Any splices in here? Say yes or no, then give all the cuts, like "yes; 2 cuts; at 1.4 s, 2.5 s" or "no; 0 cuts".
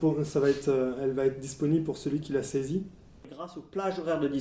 yes; 1 cut; at 3.4 s